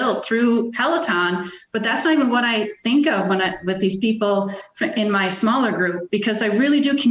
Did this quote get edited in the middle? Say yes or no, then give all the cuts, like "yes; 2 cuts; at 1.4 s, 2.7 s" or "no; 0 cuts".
no; 0 cuts